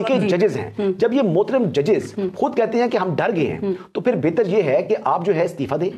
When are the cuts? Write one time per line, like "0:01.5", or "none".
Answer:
none